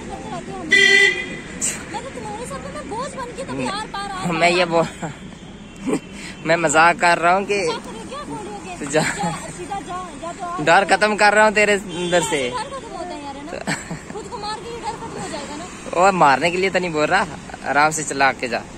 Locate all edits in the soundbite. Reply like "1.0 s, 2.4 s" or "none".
none